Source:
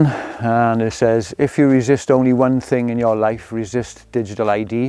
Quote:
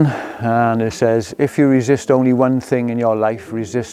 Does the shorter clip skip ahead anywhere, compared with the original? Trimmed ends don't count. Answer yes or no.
no